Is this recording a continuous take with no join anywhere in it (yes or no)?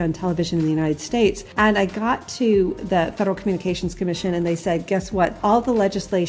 no